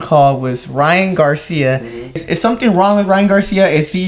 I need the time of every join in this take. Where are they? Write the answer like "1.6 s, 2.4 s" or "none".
2.2 s